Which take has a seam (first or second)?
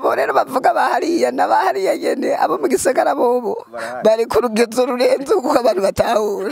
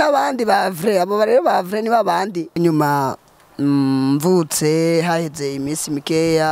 second